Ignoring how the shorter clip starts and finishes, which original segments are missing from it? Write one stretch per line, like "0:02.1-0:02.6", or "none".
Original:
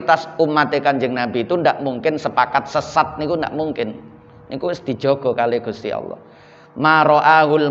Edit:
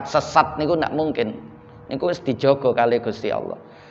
none